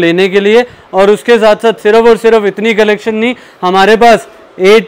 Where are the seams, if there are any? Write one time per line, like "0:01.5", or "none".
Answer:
none